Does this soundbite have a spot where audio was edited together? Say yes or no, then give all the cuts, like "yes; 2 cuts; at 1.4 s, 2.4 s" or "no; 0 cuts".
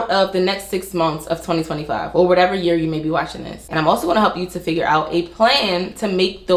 no; 0 cuts